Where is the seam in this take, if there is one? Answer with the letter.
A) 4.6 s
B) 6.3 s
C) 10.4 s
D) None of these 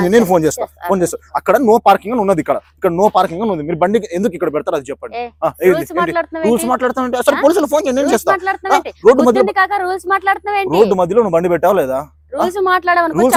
D